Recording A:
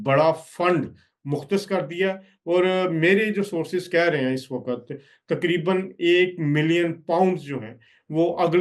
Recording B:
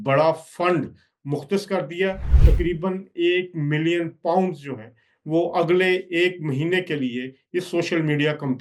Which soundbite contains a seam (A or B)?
B